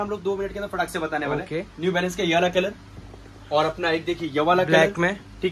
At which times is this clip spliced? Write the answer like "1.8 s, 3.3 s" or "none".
none